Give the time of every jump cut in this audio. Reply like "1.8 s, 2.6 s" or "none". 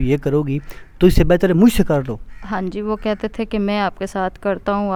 none